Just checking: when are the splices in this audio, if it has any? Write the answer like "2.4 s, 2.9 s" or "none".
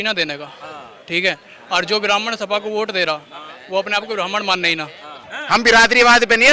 5.3 s